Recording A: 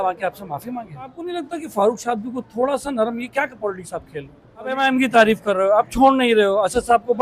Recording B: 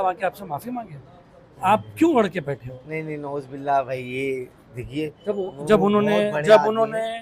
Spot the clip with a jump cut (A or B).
A